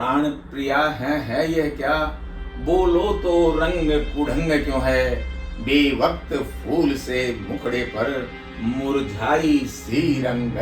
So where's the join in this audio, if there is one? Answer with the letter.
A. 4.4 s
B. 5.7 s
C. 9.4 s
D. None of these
D